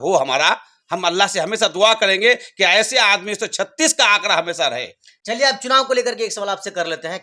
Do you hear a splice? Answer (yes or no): no